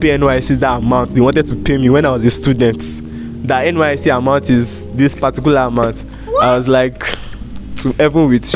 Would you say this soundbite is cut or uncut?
uncut